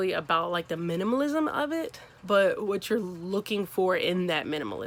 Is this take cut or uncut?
uncut